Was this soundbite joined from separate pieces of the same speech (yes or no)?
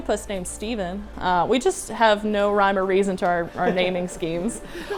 no